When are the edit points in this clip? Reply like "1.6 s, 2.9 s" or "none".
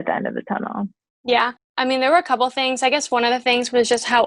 1.6 s

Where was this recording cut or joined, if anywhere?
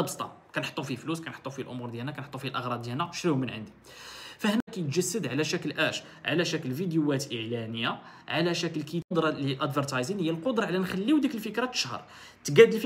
4.6 s, 9.1 s

